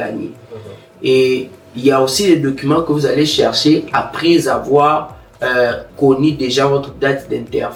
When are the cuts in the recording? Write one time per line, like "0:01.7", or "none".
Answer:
none